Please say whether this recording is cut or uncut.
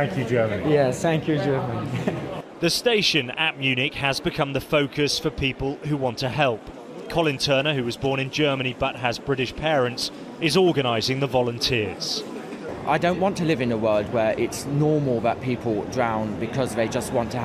cut